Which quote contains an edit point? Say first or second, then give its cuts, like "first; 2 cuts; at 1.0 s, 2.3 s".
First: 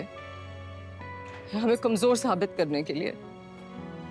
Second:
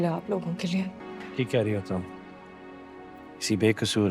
second; 1 cut; at 1.1 s